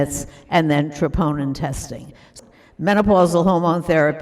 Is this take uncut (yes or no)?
no